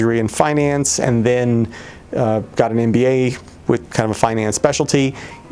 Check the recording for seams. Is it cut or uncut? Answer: uncut